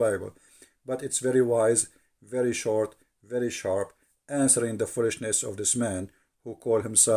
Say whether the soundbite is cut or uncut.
uncut